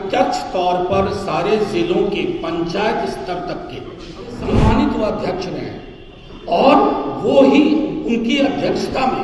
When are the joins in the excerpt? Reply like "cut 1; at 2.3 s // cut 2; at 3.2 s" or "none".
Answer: cut 1; at 4.5 s